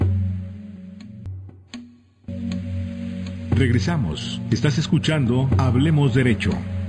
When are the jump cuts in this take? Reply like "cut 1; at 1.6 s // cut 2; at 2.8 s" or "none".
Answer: cut 1; at 1.0 s